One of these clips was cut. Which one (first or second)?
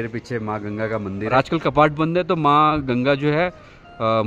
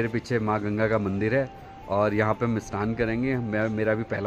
first